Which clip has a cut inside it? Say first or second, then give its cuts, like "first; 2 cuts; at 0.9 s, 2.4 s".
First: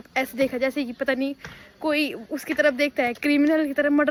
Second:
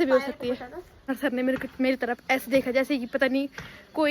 second; 1 cut; at 1.1 s